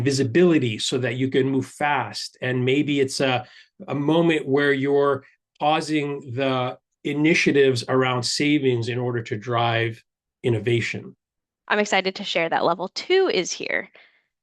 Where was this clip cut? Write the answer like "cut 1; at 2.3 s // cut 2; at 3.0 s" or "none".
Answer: cut 1; at 11.5 s